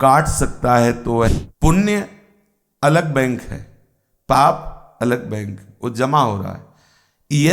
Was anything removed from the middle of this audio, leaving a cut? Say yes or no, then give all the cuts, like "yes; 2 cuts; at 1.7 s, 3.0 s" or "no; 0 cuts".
yes; 1 cut; at 1.3 s